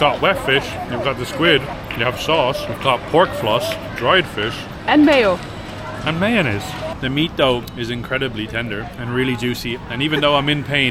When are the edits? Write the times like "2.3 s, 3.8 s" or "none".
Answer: 1.7 s, 2.7 s, 3.9 s, 6.9 s, 7.7 s, 8.9 s